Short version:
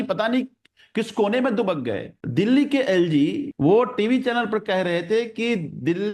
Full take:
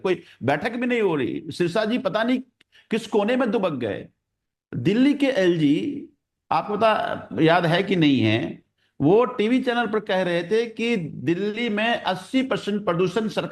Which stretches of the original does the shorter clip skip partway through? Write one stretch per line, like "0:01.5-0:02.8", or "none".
0:04.1-0:04.6
0:06.0-0:08.9